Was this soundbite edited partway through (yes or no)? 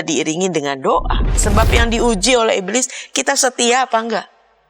yes